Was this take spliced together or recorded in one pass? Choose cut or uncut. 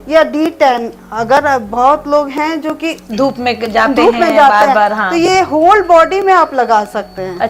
uncut